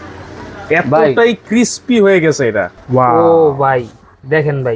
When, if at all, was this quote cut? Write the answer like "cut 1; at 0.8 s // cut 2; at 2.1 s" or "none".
cut 1; at 2.7 s